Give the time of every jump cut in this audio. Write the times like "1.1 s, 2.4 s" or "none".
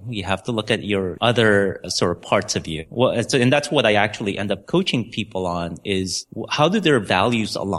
1.1 s, 1.8 s, 2.9 s, 4.6 s